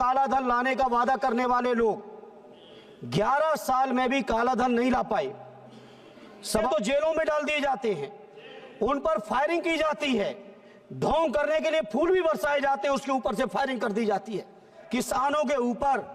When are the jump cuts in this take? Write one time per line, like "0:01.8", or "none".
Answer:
0:06.7
0:14.7